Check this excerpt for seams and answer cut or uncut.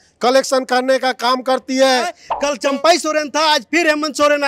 cut